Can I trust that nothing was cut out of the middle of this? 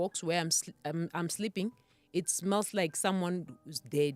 yes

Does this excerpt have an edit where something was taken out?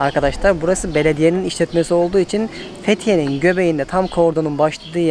no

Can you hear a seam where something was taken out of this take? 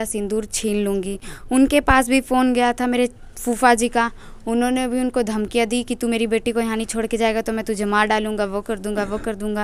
no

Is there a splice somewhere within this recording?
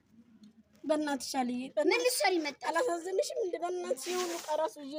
no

